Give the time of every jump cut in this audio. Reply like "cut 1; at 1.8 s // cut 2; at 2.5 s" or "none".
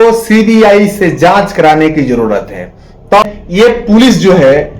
cut 1; at 3.2 s

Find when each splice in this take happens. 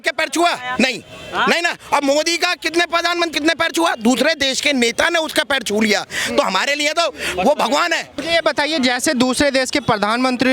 cut 1; at 3.3 s // cut 2; at 8.1 s

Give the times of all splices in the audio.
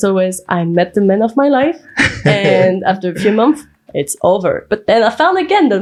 none

